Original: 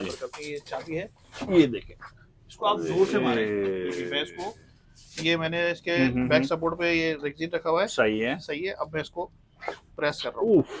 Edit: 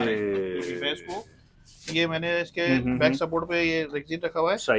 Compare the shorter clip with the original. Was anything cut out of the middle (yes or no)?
no